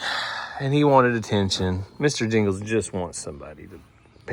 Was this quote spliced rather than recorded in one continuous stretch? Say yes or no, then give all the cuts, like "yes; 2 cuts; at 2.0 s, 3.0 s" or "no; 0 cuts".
no; 0 cuts